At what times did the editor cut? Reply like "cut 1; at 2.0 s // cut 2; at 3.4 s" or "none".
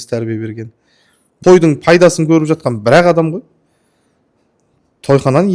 cut 1; at 1.4 s